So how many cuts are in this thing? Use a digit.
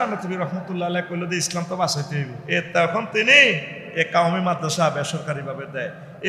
1